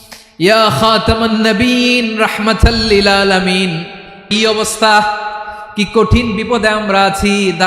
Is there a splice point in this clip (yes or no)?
yes